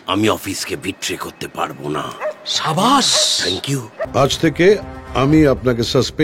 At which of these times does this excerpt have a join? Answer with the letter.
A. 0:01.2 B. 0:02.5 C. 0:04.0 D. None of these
C